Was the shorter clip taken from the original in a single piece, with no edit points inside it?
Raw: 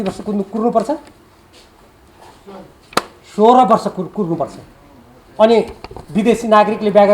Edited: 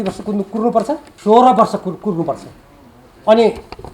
no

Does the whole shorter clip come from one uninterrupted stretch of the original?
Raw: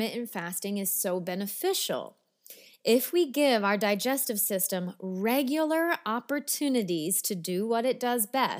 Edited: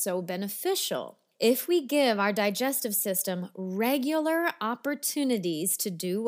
no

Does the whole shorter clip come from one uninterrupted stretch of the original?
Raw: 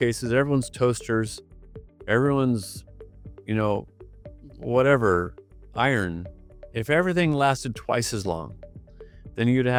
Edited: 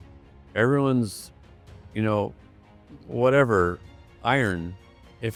yes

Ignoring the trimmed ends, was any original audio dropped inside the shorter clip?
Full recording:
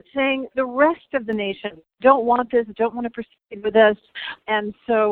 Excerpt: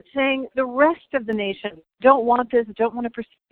no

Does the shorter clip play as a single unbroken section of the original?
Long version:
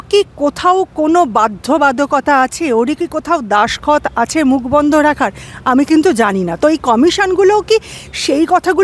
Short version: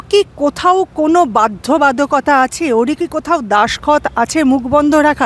yes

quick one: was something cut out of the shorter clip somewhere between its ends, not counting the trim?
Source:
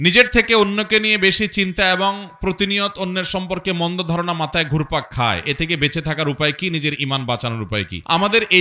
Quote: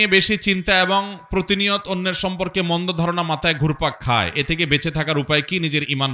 no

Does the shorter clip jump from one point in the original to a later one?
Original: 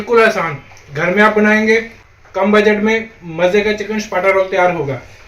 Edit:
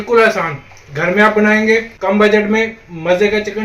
yes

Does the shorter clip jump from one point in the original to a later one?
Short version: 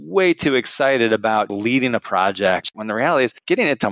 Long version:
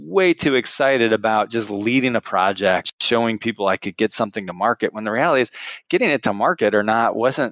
yes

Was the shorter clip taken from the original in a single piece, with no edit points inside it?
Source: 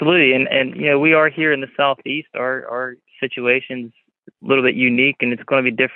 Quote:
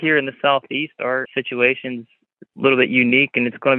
no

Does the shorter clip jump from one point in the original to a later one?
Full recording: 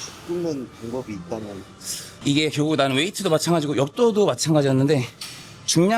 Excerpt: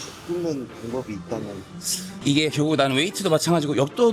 no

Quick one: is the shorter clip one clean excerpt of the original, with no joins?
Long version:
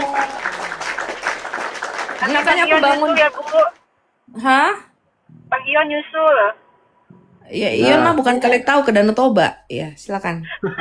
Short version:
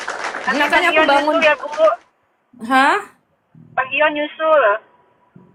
yes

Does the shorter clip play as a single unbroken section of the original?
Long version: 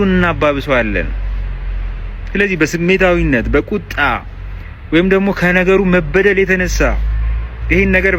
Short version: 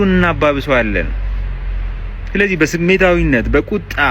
yes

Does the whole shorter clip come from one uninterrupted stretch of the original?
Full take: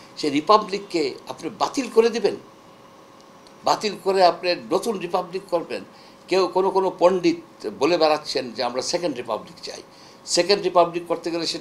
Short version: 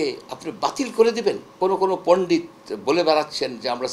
no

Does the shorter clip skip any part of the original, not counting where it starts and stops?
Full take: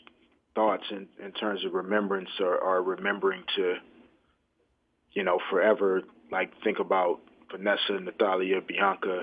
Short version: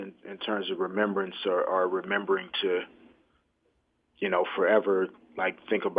no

